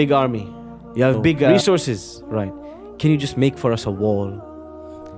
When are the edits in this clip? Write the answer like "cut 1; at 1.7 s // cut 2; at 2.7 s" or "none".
cut 1; at 1.5 s